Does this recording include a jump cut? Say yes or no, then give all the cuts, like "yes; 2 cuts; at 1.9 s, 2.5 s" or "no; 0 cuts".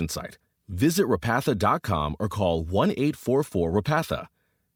no; 0 cuts